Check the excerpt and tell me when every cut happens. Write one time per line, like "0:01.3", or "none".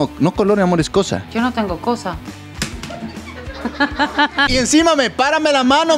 0:01.3
0:04.5